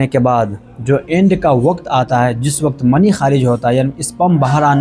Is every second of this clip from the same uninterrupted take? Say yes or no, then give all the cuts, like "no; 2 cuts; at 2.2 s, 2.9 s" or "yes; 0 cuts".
yes; 0 cuts